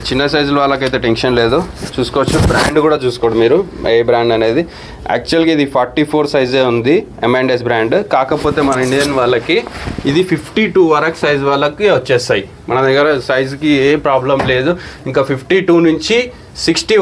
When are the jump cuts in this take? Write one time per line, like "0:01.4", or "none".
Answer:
none

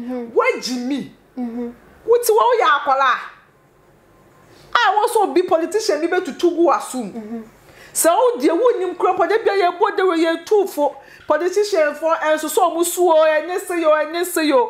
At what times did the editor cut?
none

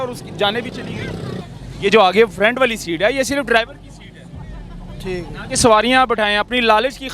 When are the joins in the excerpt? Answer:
0:01.4

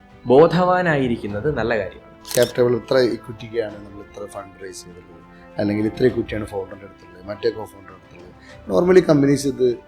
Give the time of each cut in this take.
0:02.3

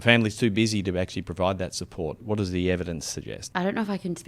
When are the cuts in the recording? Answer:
0:02.2
0:03.4

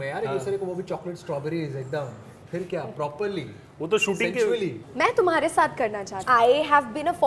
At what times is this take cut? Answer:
0:04.8
0:06.2

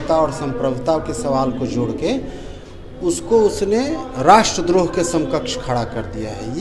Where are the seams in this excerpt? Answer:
none

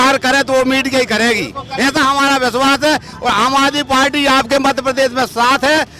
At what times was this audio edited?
none

